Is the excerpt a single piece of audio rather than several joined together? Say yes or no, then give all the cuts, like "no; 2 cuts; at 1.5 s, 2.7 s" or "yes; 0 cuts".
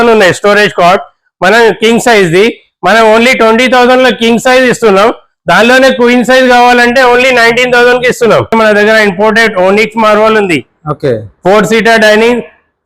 no; 1 cut; at 8.5 s